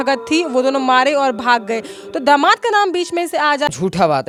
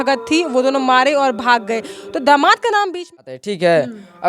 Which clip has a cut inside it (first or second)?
second